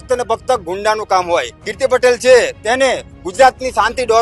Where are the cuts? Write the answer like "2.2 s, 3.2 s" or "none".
1.6 s